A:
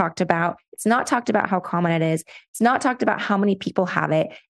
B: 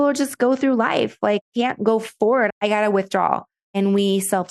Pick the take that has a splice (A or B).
B